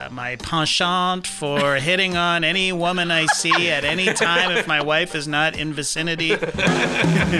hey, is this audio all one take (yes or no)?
yes